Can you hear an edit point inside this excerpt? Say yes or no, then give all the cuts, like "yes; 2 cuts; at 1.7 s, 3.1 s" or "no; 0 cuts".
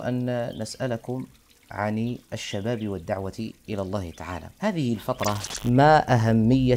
yes; 2 cuts; at 4.4 s, 5.5 s